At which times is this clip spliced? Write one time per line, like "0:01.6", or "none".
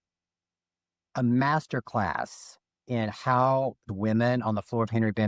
0:03.9